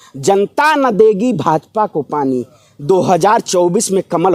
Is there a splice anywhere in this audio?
no; 0 cuts

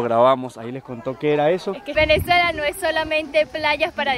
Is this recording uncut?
no; 1 cut; at 1.8 s

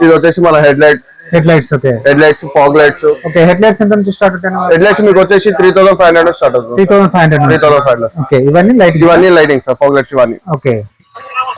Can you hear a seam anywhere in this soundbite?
no; 0 cuts

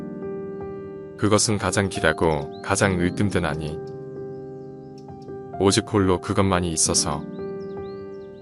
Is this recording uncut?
no; 4 cuts; at 1.1 s, 3.8 s, 5.6 s, 7.4 s

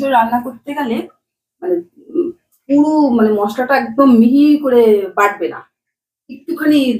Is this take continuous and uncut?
yes; 0 cuts

